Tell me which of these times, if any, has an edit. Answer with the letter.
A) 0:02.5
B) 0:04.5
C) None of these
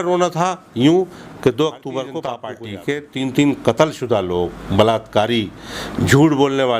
A